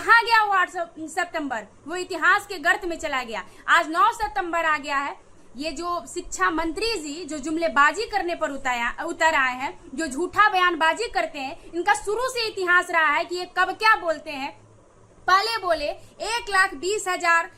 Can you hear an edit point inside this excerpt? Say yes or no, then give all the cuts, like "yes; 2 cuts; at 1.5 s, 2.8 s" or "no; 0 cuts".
no; 0 cuts